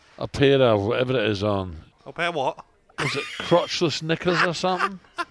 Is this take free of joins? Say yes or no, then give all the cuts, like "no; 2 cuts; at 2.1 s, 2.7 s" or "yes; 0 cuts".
no; 1 cut; at 1.9 s